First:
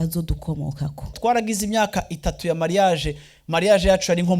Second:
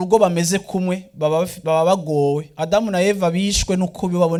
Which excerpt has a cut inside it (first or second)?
first